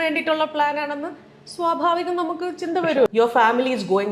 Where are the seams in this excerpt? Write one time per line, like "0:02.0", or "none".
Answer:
0:03.1